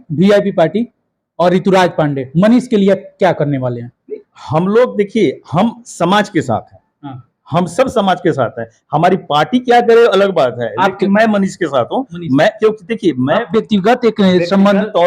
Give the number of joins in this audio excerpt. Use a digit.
0